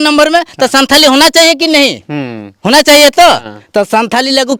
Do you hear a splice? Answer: no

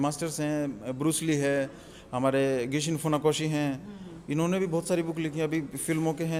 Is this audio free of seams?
yes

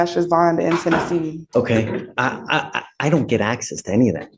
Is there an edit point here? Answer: yes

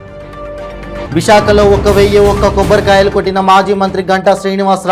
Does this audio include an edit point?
yes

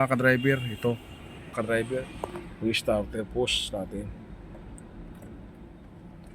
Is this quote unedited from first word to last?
no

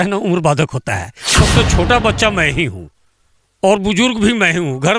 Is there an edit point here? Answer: yes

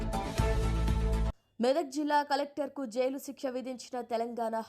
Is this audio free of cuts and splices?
no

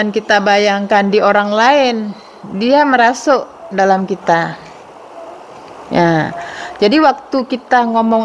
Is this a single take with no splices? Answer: yes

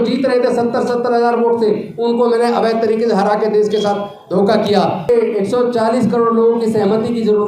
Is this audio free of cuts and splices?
no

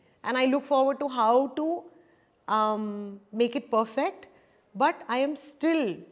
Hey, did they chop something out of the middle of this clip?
no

